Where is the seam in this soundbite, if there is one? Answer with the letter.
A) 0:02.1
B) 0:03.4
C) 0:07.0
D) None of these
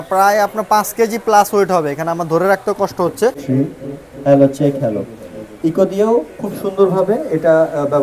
B